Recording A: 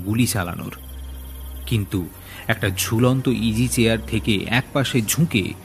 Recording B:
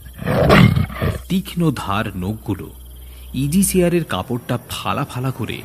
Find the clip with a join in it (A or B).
B